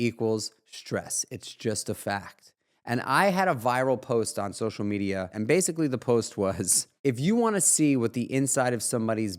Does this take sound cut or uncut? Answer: cut